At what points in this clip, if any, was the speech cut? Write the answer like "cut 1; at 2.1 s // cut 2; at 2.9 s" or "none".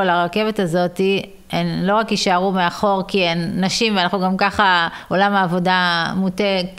none